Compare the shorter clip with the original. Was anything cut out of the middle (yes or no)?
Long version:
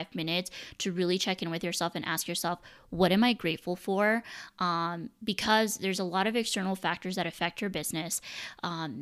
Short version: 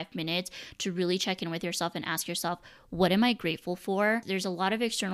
yes